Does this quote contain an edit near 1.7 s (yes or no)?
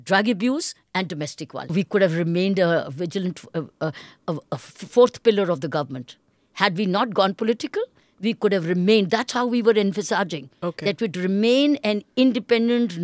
yes